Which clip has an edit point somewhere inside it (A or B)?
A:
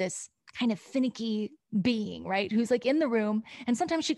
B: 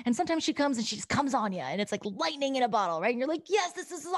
A